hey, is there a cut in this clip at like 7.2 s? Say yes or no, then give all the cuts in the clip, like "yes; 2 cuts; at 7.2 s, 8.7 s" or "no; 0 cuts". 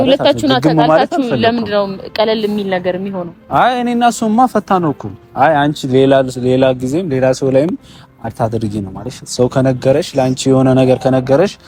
no; 0 cuts